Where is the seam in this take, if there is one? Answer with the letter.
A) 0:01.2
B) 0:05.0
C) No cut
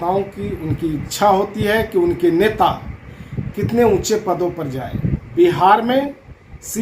B